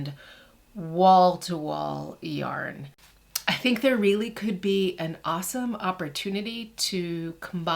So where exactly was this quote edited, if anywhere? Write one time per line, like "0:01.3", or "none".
0:03.0